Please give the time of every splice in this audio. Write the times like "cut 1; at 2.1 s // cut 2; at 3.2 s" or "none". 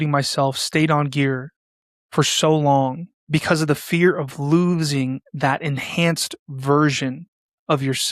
cut 1; at 3.1 s